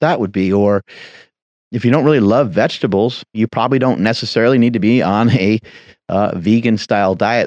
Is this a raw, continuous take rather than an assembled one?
no; 1 cut; at 3.4 s

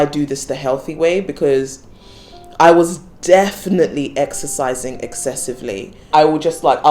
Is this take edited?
yes; 1 cut; at 6.0 s

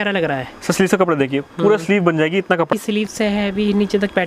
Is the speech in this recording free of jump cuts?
no; 1 cut; at 2.7 s

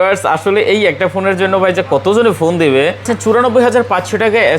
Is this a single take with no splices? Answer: no; 1 cut; at 3.1 s

